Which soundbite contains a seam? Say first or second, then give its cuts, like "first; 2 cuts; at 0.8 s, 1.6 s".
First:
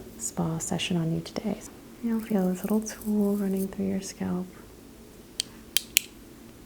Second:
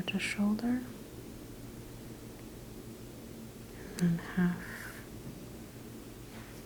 first; 2 cuts; at 1.6 s, 4.7 s